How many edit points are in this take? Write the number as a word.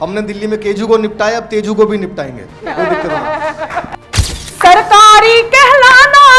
one